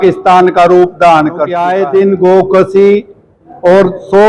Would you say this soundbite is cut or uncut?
cut